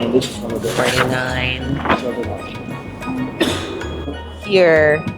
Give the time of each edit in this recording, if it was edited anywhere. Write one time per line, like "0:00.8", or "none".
0:04.0